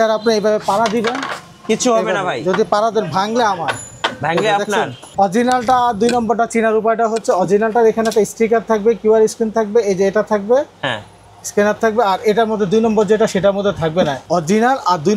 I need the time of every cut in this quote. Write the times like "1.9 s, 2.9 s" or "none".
5.1 s, 14.2 s